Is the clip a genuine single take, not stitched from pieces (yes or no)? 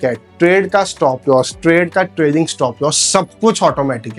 yes